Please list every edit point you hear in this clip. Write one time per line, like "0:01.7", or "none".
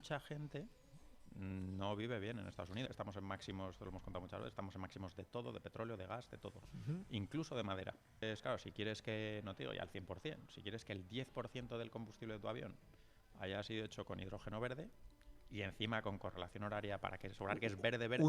0:02.9
0:08.2